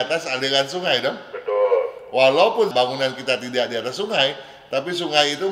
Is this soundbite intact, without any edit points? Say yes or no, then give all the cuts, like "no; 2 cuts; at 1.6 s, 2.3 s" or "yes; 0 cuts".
yes; 0 cuts